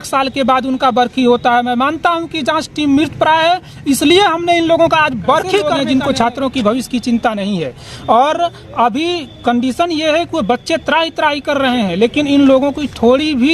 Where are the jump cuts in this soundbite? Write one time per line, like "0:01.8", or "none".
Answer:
0:05.7